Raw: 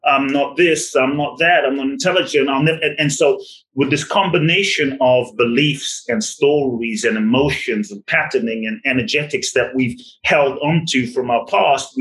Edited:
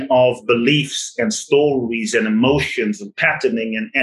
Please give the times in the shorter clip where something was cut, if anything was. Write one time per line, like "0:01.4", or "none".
none